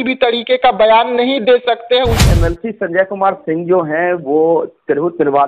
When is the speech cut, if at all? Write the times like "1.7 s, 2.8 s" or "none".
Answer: 2.2 s